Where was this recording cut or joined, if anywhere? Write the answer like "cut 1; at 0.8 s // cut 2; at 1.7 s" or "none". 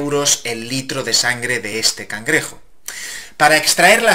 none